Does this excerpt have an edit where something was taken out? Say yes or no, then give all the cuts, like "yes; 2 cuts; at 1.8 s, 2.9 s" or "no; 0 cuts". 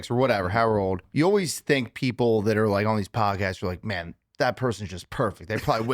yes; 1 cut; at 1.0 s